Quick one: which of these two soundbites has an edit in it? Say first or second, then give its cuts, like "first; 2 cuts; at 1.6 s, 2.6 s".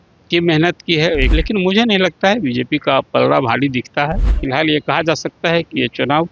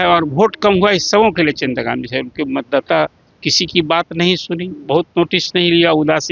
first; 2 cuts; at 1.3 s, 4.3 s